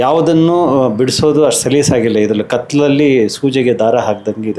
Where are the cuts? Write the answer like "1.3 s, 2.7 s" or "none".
none